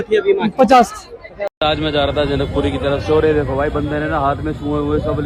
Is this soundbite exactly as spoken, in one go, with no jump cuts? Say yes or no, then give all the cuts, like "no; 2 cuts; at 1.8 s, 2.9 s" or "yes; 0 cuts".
no; 1 cut; at 1.5 s